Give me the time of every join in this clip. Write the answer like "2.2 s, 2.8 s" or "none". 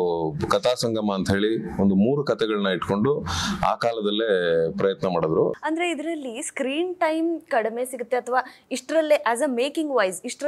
5.6 s